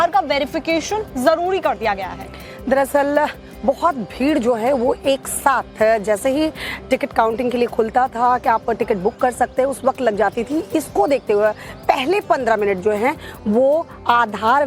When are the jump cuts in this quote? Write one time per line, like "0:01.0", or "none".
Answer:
0:01.6